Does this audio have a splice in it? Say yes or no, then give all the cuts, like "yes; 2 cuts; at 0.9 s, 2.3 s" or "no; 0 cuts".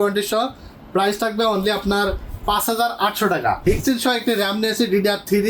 yes; 1 cut; at 3.7 s